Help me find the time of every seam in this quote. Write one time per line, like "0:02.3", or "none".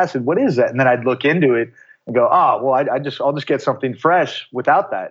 none